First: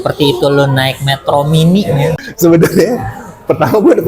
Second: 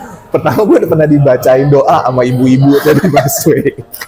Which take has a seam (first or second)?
first